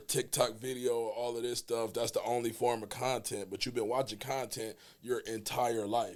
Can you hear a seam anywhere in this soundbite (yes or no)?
no